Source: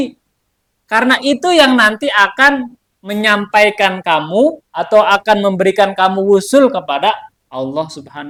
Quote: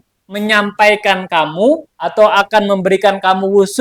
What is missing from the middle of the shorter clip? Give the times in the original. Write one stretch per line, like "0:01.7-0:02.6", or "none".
none